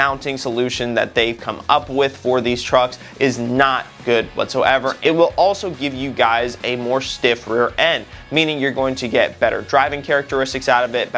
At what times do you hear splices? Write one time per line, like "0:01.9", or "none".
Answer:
0:04.9